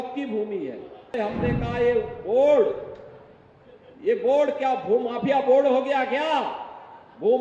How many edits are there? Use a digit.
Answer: 1